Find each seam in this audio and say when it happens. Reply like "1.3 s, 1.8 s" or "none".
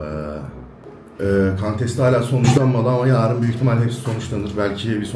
none

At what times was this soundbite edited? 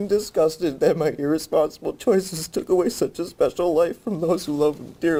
none

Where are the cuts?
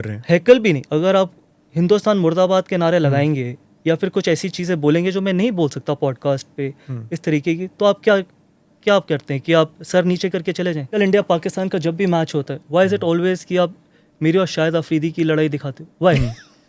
11.0 s

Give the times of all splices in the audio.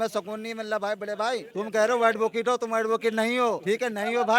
none

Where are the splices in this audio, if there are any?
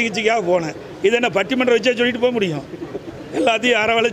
none

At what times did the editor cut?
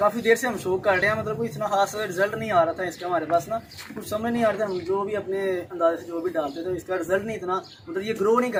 none

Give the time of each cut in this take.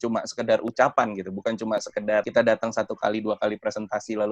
2.3 s

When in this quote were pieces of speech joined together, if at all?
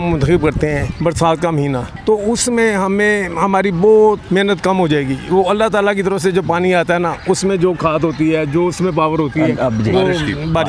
0.9 s, 1.9 s, 4.2 s

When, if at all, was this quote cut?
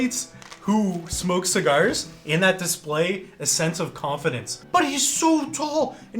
4.5 s

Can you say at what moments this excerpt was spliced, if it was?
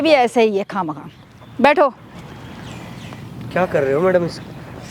none

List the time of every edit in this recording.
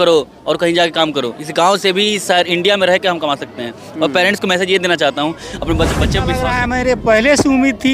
6.4 s

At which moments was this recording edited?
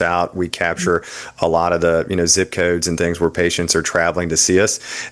none

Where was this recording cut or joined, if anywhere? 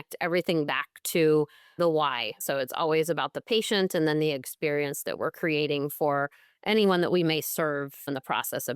2.4 s

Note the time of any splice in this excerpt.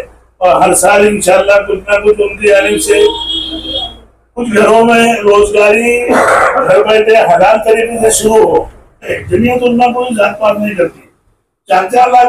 9.2 s

